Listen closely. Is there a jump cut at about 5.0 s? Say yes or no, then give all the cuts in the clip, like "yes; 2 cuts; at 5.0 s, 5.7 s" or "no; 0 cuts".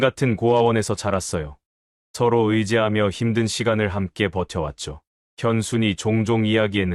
no; 0 cuts